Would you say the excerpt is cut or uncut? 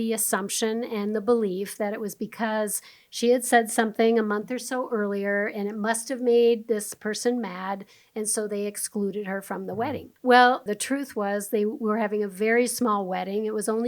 cut